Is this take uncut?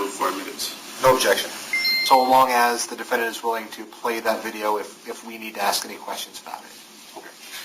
no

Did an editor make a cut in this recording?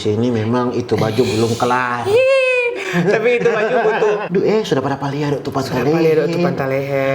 yes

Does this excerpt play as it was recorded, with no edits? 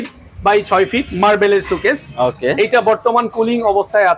yes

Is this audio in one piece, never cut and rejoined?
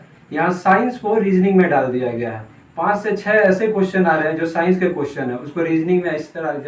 yes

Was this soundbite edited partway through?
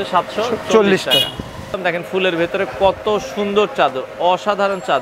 yes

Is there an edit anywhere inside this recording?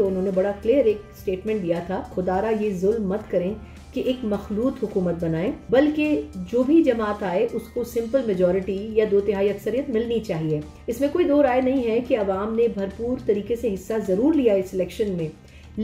yes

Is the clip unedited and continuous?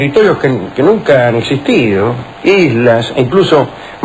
no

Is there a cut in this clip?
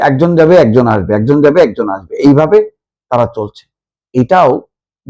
no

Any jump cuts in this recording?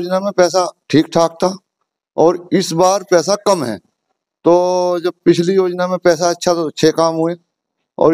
no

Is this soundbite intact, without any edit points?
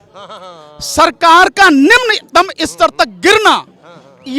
yes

